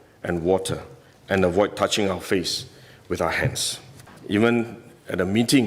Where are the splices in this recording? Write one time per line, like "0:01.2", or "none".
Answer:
0:04.1

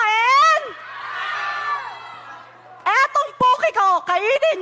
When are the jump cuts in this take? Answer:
none

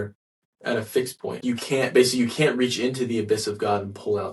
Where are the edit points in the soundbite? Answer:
0:01.4

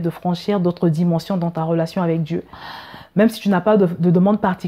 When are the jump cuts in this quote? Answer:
0:02.6

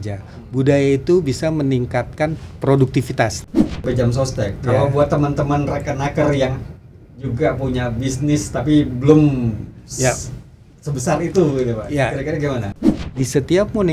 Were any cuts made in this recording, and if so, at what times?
0:03.8
0:12.8

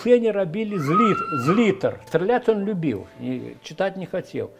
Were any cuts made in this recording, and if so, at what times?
0:02.0

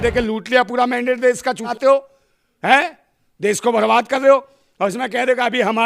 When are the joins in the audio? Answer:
0:01.7

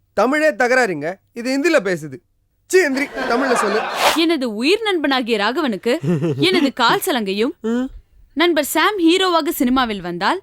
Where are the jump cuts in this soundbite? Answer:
0:04.0

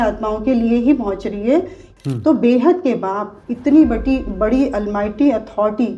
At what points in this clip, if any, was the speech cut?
0:01.8

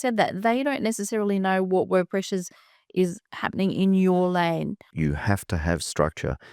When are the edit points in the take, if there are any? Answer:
0:04.9

